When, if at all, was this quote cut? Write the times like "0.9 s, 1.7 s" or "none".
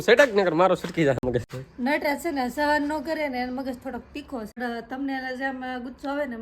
1.4 s, 4.6 s

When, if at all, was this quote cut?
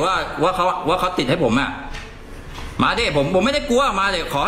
none

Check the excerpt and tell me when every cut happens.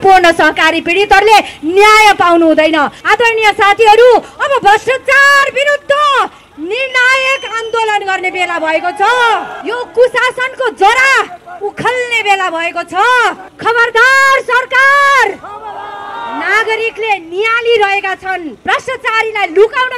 3.0 s, 9.5 s, 13.5 s, 18.5 s

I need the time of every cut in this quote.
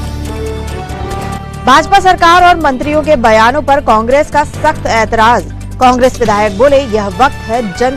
1.5 s

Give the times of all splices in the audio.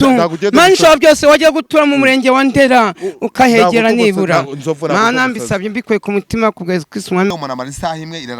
7.3 s

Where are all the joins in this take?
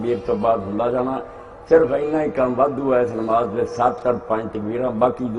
0.9 s

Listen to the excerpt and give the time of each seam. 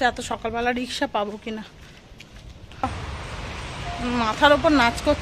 2.8 s

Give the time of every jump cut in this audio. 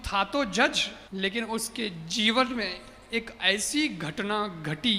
0.9 s

